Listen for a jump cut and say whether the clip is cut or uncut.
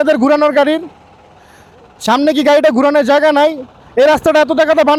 uncut